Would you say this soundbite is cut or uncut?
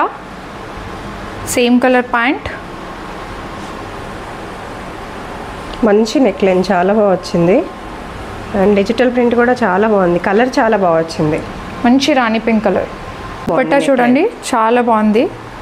cut